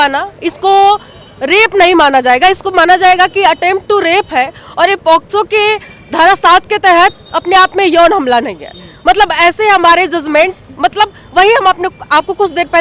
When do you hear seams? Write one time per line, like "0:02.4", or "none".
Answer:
none